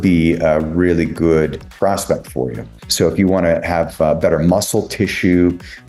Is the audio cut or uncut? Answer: cut